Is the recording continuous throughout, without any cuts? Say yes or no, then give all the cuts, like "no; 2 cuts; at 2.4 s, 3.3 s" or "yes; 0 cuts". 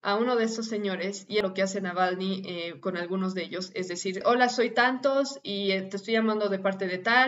no; 2 cuts; at 1.4 s, 4.2 s